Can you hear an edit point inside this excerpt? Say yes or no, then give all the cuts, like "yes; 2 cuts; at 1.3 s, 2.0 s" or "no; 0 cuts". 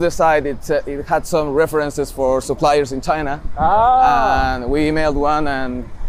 no; 0 cuts